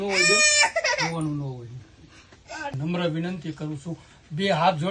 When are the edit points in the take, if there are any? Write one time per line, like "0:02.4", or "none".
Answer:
0:02.7